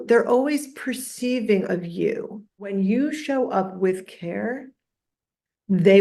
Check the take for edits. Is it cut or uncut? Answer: cut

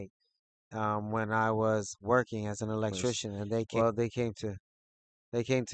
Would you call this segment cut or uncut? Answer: cut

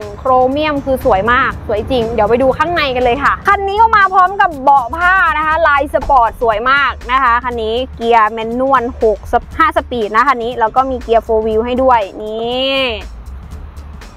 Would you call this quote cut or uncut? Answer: cut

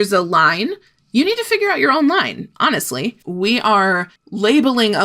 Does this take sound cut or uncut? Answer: cut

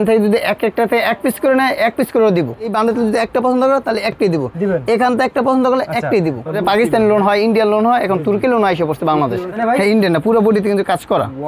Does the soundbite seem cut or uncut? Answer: cut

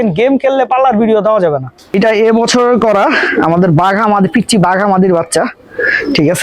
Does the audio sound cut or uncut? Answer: cut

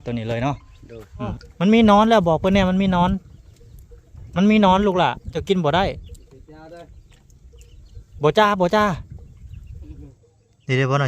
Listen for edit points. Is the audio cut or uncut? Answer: cut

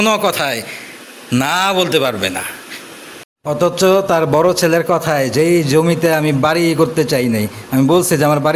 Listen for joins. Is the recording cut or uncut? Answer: uncut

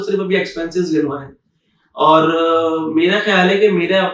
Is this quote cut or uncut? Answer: uncut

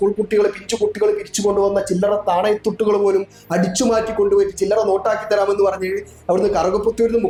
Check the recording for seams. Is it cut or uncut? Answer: uncut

